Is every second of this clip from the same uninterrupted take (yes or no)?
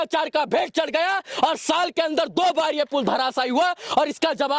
yes